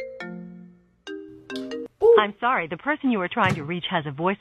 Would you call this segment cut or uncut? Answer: uncut